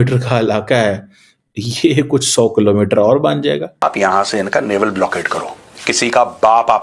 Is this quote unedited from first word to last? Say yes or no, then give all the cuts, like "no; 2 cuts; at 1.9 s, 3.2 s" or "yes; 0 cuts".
no; 1 cut; at 3.8 s